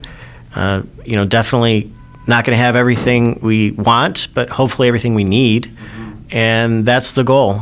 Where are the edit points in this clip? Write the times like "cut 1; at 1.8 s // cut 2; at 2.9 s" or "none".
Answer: cut 1; at 3.4 s